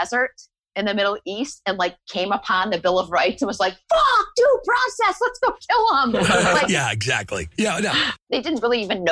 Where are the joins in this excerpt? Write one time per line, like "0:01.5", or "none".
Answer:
0:08.2